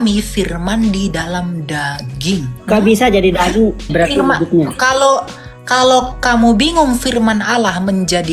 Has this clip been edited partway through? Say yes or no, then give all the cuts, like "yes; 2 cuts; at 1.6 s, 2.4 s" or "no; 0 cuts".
yes; 2 cuts; at 2.5 s, 3.9 s